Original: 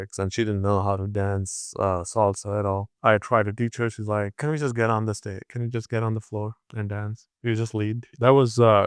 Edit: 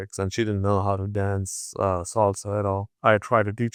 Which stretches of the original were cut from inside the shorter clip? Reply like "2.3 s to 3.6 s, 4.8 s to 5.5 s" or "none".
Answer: none